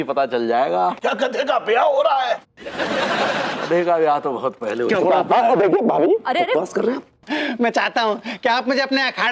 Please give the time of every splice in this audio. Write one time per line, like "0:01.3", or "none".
0:01.0
0:07.2